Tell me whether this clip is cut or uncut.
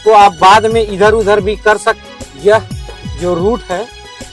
cut